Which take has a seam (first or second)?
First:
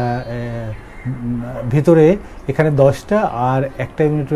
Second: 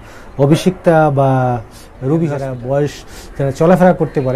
second